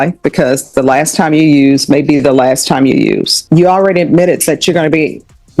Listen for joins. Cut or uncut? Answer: cut